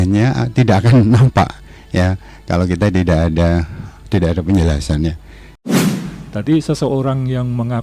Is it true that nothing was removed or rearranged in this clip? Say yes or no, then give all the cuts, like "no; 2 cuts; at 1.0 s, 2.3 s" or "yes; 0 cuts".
no; 1 cut; at 5.7 s